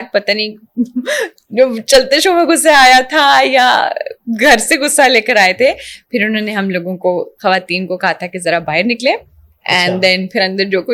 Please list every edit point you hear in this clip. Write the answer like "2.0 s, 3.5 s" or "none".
none